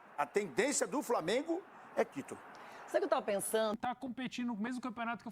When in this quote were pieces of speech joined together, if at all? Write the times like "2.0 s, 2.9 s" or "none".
3.8 s